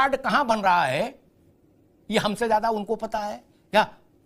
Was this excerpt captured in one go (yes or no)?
yes